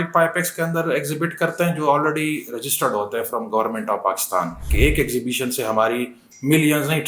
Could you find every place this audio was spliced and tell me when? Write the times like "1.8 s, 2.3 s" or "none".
4.7 s